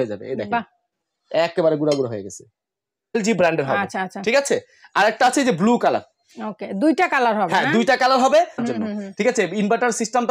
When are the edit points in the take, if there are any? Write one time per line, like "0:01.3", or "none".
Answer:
0:03.2
0:08.6